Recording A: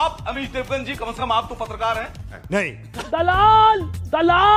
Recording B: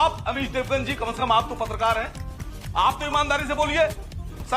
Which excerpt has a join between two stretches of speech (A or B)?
B